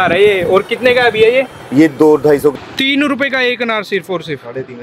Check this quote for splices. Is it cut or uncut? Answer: cut